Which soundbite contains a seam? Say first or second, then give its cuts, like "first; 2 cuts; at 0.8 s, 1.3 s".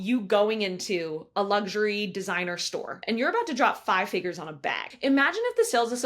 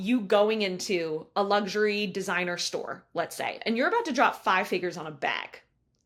first; 2 cuts; at 3.0 s, 4.9 s